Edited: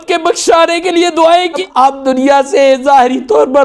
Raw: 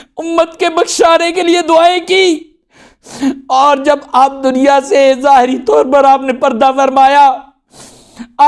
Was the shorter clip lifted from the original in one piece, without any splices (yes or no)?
no